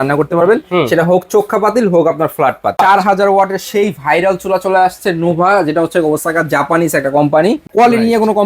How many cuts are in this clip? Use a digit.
2